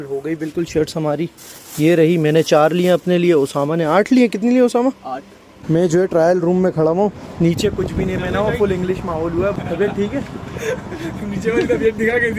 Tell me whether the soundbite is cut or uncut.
cut